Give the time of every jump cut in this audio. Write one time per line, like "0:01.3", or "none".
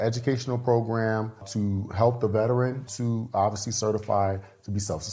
0:01.5
0:02.9